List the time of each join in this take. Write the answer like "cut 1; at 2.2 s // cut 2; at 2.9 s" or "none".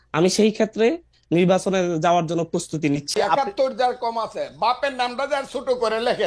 cut 1; at 3.1 s